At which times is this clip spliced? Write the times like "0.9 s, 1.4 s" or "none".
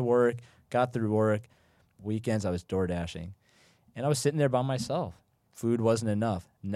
5.4 s